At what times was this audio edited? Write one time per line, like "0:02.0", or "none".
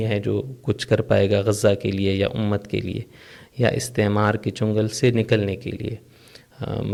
none